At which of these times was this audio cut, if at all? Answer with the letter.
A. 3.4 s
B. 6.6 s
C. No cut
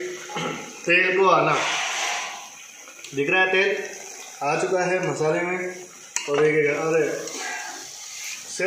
C